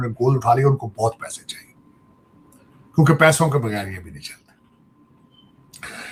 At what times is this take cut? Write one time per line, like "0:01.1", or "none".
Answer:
none